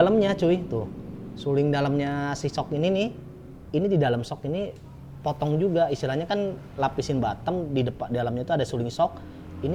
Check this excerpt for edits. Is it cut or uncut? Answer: uncut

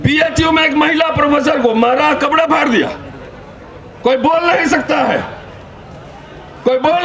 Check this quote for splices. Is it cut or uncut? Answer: uncut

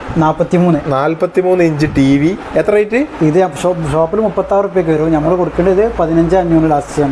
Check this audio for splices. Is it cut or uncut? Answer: uncut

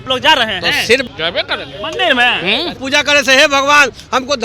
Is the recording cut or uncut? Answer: cut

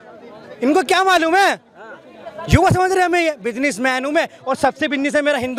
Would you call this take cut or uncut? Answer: uncut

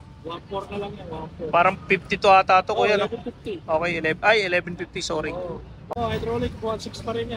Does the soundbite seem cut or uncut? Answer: cut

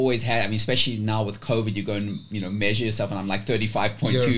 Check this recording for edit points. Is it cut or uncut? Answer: uncut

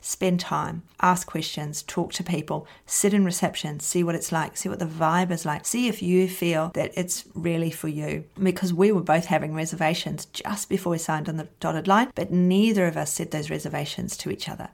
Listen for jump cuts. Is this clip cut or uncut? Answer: uncut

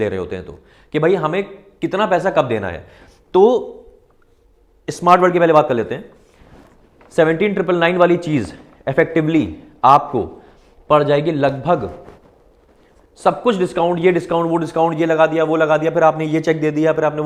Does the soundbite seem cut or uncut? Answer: uncut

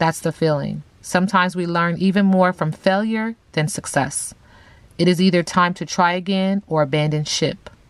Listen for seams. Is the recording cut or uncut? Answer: uncut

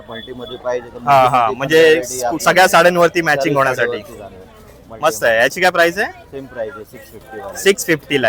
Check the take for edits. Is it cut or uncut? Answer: uncut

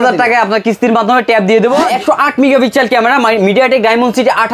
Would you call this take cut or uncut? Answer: cut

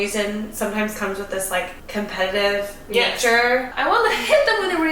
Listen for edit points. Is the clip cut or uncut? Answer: cut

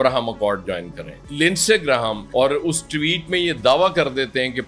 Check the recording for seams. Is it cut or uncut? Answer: cut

